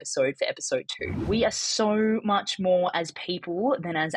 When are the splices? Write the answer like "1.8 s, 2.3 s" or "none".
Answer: 1.2 s